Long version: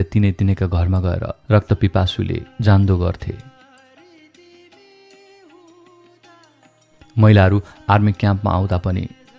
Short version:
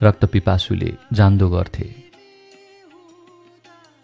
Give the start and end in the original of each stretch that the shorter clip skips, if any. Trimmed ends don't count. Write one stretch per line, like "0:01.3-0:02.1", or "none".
0:03.4-0:04.5